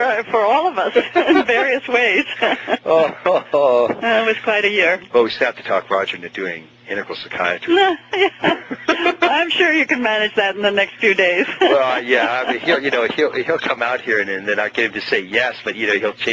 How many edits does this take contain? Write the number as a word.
one